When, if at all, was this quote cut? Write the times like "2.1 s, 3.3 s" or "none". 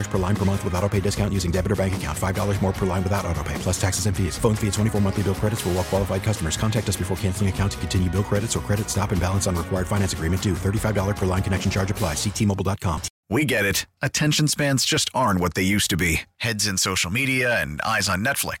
13.1 s